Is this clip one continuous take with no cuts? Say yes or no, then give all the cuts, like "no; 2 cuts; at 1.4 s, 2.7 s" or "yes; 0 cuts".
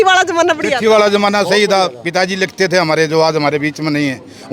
yes; 0 cuts